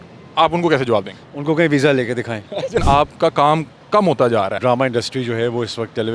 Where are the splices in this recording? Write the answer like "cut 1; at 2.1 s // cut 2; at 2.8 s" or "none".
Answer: cut 1; at 2.8 s // cut 2; at 4.6 s